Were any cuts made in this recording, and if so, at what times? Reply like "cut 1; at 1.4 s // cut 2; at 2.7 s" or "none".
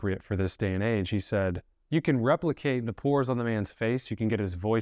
cut 1; at 1.7 s